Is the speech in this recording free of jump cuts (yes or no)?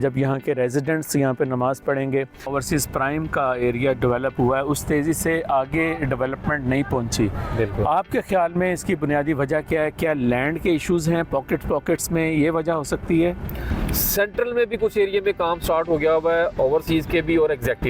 no